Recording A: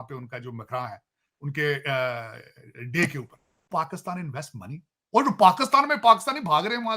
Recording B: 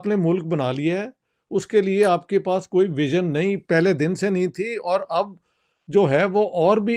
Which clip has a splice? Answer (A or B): A